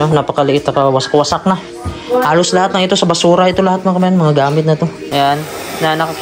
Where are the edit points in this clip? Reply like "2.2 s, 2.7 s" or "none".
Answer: 5.0 s